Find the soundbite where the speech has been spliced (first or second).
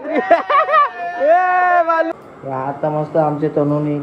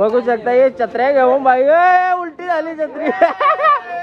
first